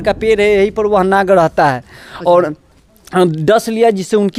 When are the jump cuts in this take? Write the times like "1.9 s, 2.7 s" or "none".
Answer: none